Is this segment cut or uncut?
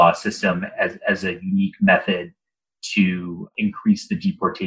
cut